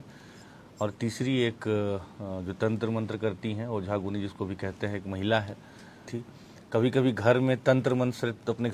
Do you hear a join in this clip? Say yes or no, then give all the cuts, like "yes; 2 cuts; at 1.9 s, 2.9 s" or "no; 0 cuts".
yes; 1 cut; at 6.2 s